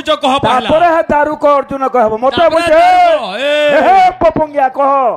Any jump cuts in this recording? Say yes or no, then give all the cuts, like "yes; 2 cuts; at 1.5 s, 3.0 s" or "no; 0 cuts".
no; 0 cuts